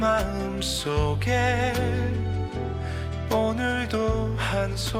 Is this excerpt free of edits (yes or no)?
yes